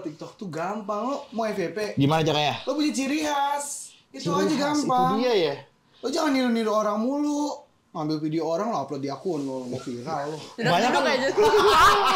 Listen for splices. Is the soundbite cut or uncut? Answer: uncut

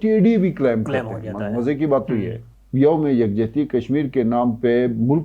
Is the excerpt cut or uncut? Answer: cut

